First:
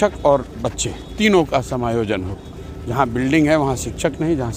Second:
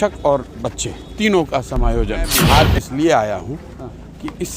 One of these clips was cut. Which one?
second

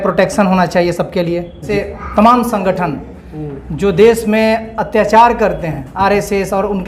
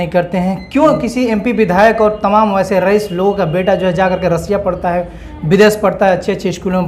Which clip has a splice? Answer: first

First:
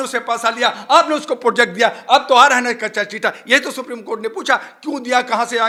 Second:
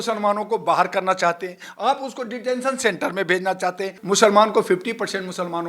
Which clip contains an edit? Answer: second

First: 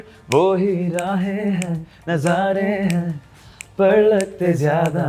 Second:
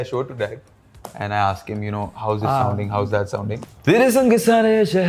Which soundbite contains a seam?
second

